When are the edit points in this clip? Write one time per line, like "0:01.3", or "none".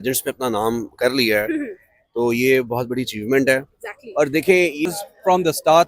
0:04.9